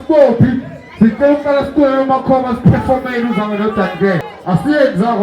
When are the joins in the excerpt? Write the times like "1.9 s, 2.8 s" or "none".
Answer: 4.2 s